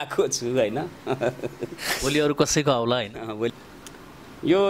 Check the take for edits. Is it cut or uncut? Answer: cut